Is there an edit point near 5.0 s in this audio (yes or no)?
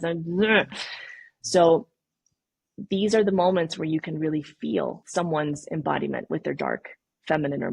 yes